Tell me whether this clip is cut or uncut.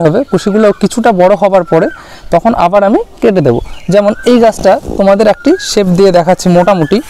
uncut